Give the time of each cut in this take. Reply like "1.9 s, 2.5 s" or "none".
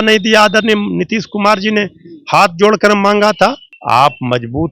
3.7 s